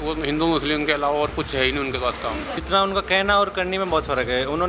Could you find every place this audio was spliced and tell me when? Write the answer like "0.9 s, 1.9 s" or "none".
2.5 s